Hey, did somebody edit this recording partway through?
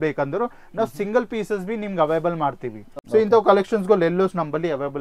yes; 1 cut; at 3.0 s

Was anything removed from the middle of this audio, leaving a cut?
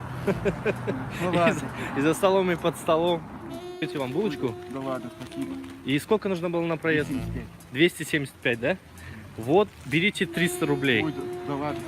yes; 1 cut; at 3.8 s

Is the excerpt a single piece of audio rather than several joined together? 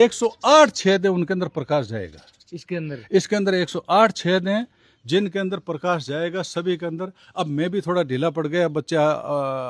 yes; 0 cuts

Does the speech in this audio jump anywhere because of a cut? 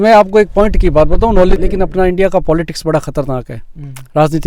yes; 1 cut; at 1.6 s

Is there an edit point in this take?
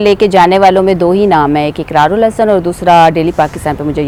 no; 0 cuts

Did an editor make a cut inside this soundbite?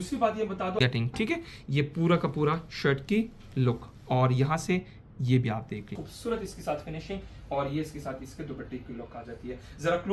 yes; 2 cuts; at 0.8 s, 6.0 s

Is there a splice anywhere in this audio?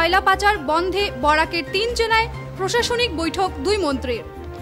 no; 0 cuts

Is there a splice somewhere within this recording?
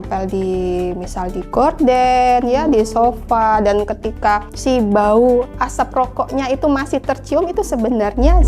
no; 0 cuts

